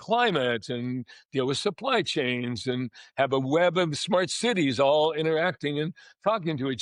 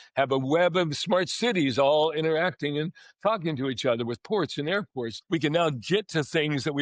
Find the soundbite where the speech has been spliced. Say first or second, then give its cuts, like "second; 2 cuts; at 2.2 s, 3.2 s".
second; 1 cut; at 5.1 s